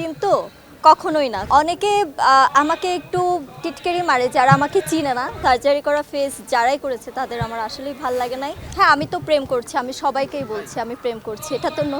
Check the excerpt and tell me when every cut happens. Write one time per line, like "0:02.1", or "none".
0:01.4
0:05.4
0:08.6